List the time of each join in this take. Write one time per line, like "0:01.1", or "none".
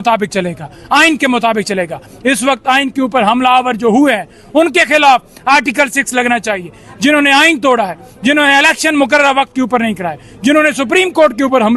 none